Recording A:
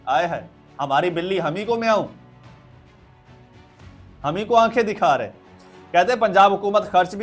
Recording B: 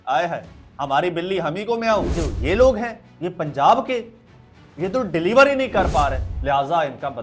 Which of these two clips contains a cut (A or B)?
B